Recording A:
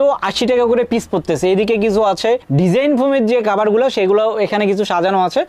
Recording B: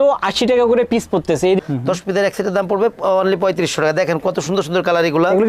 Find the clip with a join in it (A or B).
B